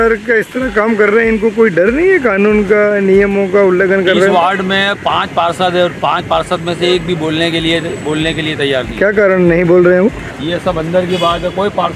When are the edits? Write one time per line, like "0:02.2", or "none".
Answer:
0:10.3